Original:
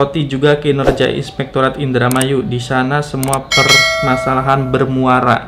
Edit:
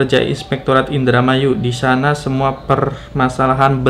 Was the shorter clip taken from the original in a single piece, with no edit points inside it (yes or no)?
yes